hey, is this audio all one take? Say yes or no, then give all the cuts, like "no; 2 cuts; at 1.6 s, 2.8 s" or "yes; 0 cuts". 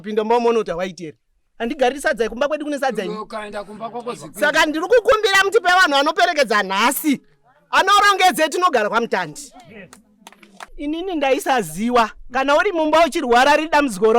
no; 1 cut; at 10.7 s